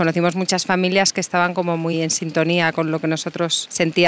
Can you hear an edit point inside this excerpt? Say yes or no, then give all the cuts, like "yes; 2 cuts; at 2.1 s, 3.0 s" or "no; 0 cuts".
no; 0 cuts